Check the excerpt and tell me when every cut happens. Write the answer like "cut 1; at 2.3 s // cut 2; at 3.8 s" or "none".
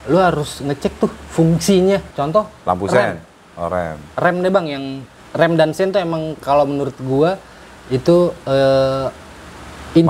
none